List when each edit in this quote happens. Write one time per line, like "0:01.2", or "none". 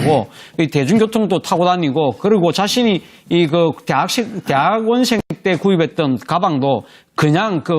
0:03.9